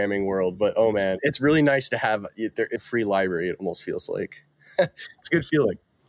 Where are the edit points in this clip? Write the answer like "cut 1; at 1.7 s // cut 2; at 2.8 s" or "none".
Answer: cut 1; at 1.2 s // cut 2; at 2.8 s